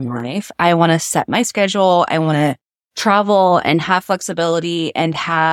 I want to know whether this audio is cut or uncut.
uncut